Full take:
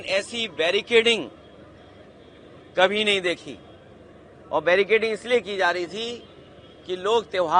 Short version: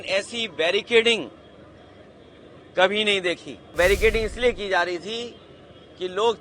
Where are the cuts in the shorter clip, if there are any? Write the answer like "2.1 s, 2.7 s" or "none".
3.8 s